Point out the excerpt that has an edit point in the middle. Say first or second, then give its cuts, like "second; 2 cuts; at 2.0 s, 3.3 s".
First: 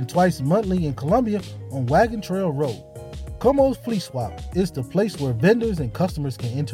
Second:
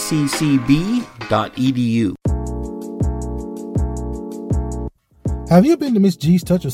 second; 1 cut; at 2.2 s